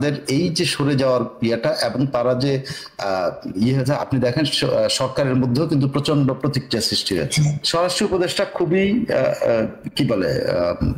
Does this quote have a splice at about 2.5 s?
no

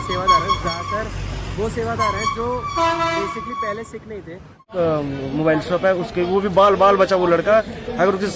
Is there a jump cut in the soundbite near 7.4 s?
no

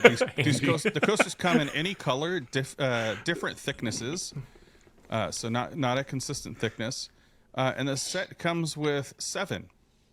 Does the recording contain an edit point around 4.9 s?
no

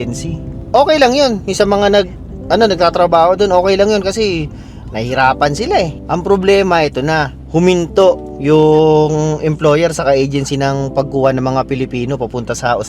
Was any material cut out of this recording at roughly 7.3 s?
no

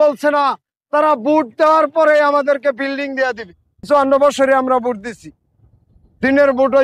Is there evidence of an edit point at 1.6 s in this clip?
no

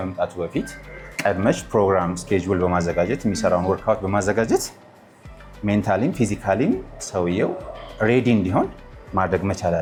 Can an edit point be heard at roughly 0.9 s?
no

